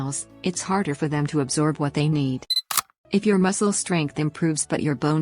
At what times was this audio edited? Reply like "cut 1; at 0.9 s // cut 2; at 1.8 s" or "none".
cut 1; at 2.5 s